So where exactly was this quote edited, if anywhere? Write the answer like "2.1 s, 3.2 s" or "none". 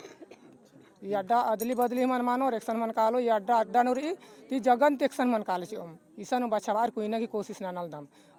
none